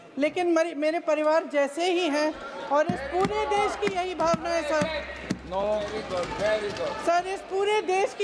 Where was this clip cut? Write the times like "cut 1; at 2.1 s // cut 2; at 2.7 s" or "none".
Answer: none